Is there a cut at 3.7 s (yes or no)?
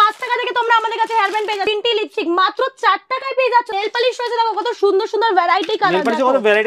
yes